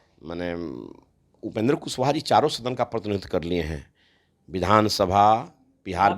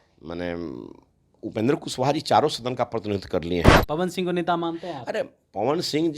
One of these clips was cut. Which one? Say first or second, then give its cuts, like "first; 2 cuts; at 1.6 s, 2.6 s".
second; 1 cut; at 3.8 s